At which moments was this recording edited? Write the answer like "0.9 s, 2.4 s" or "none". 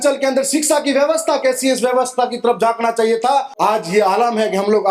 3.5 s